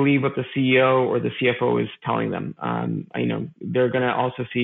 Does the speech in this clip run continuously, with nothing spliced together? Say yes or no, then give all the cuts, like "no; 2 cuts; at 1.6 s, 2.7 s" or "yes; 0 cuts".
yes; 0 cuts